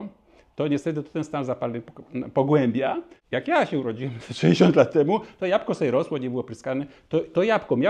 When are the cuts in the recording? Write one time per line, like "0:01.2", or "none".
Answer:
0:03.1